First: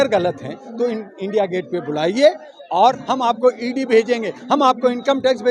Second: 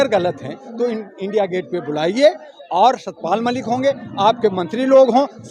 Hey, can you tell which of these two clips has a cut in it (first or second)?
first